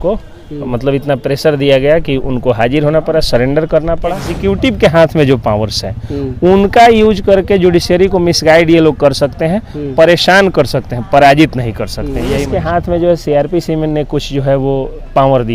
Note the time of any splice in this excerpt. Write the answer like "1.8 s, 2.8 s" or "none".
4.3 s, 12.4 s